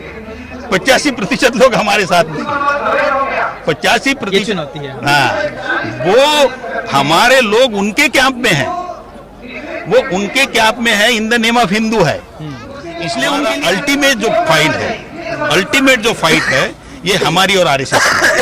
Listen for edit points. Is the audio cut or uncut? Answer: cut